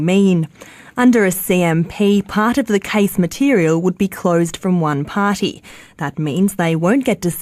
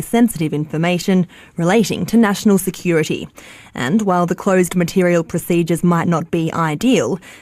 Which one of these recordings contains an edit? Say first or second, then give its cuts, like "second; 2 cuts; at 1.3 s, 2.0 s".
second; 1 cut; at 6.5 s